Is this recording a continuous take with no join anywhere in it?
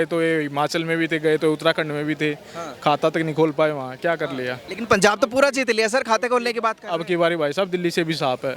yes; 0 cuts

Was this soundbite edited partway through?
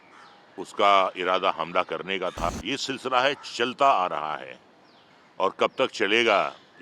yes; 1 cut; at 2.5 s

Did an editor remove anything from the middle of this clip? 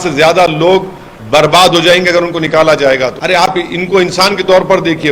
yes; 1 cut; at 3.2 s

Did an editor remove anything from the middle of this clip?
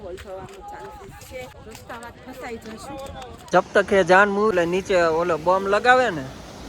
yes; 3 cuts; at 1.5 s, 3.5 s, 4.5 s

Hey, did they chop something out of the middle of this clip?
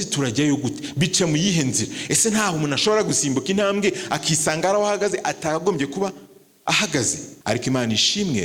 yes; 1 cut; at 7.3 s

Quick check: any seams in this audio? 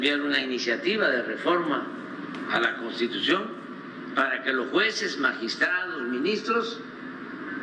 no; 0 cuts

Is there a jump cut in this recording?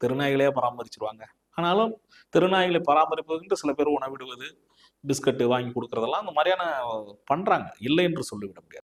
no; 0 cuts

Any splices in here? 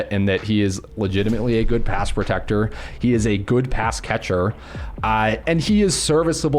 no; 0 cuts

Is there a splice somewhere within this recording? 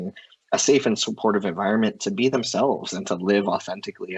no; 0 cuts

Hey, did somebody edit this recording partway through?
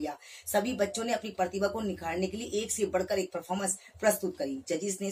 no; 0 cuts

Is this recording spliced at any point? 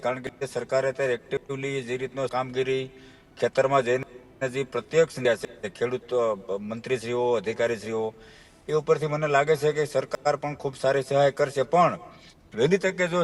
no; 0 cuts

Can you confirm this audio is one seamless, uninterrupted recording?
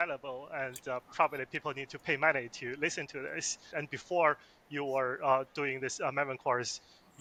yes; 0 cuts

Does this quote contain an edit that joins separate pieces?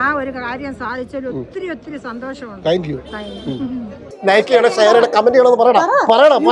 yes; 1 cut; at 4.1 s

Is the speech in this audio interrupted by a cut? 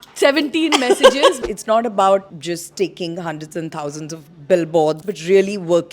yes; 3 cuts; at 1.4 s, 2.3 s, 5.0 s

